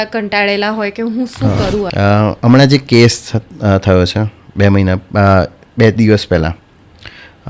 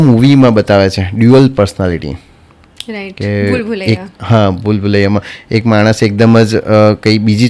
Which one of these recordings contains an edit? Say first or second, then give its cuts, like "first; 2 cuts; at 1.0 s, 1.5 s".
first; 1 cut; at 1.9 s